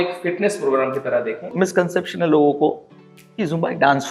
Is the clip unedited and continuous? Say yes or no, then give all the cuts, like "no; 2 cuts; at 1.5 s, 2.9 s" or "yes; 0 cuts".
no; 1 cut; at 1.5 s